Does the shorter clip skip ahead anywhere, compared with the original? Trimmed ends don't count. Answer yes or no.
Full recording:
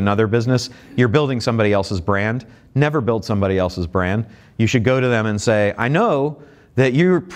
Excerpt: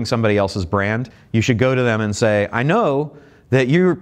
yes